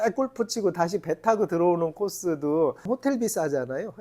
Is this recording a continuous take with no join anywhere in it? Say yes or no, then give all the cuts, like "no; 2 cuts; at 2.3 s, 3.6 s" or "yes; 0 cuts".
no; 1 cut; at 2.9 s